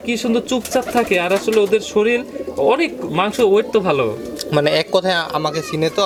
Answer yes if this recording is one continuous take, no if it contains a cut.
yes